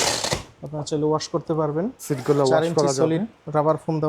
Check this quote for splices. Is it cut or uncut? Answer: cut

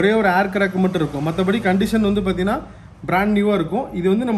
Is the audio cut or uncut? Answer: uncut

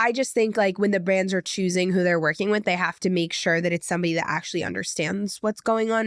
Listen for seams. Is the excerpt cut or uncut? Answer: uncut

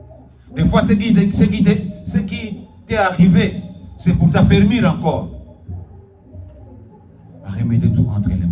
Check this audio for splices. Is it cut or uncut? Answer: cut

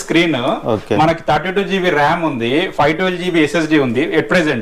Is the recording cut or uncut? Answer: uncut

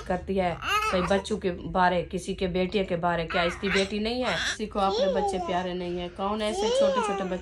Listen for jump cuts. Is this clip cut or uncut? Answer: cut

